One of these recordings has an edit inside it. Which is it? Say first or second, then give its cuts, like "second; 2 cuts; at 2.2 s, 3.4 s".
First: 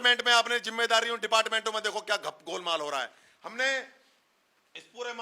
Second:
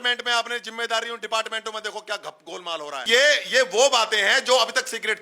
second; 1 cut; at 3.1 s